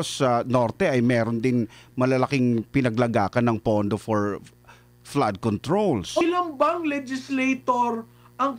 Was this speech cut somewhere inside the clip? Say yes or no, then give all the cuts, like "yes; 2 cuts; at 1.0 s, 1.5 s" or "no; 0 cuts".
yes; 1 cut; at 6.2 s